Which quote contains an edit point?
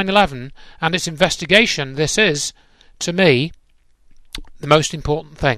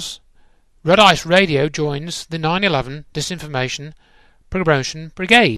second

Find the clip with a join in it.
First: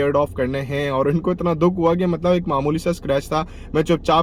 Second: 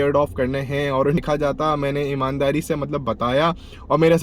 second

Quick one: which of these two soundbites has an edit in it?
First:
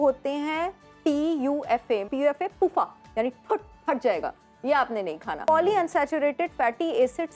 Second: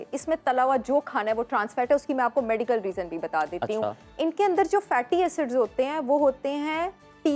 first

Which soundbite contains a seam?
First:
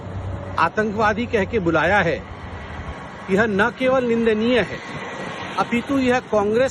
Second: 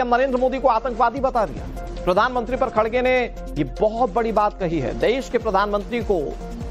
second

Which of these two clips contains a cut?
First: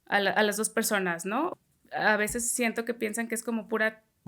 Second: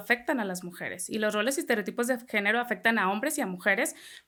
first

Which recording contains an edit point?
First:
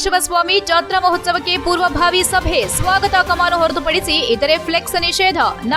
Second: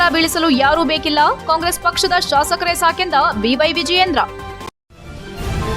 second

